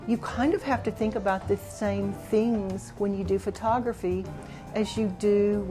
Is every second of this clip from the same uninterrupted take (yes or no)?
yes